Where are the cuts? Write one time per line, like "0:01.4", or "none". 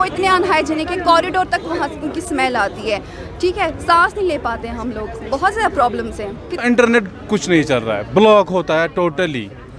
0:06.6